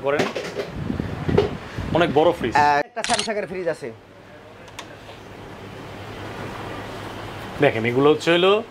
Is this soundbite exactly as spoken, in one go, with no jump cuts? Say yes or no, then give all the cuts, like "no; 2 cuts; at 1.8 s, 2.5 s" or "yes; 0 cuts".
no; 1 cut; at 2.9 s